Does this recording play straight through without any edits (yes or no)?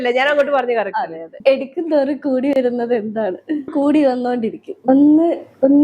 no